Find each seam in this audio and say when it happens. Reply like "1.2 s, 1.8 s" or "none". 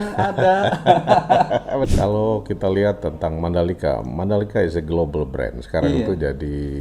1.9 s